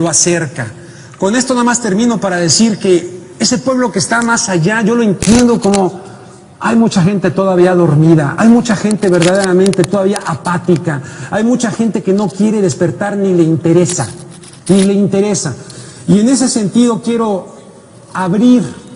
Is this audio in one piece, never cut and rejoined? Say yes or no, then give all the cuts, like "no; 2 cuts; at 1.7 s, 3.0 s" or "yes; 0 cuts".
yes; 0 cuts